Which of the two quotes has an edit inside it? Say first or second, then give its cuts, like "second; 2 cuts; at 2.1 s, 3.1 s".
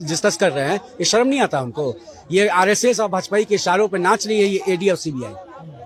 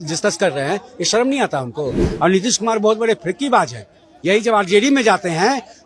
second; 1 cut; at 2.0 s